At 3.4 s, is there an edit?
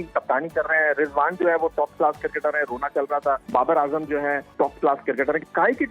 yes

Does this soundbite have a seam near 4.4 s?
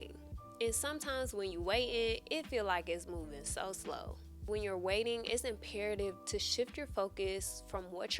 yes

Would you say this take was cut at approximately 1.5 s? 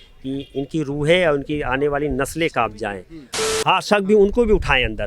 no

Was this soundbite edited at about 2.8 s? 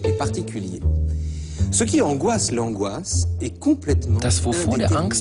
no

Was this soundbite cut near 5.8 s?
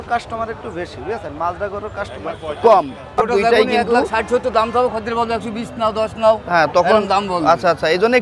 no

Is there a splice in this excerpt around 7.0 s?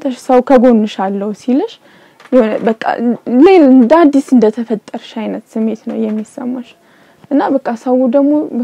no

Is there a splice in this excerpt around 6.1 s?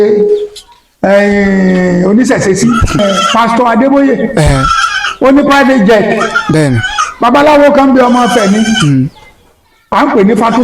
no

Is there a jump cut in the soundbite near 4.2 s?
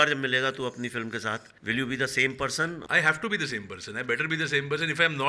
no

